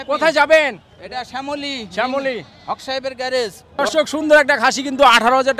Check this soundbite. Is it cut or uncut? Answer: cut